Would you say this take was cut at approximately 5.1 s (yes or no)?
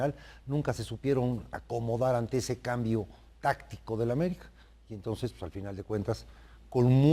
yes